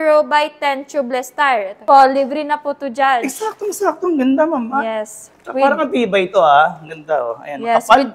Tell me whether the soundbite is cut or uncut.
cut